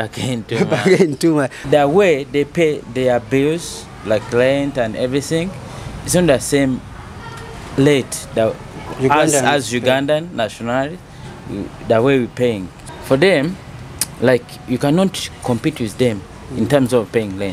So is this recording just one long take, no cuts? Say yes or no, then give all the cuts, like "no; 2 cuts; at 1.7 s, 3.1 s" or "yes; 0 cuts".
no; 2 cuts; at 1.6 s, 12.7 s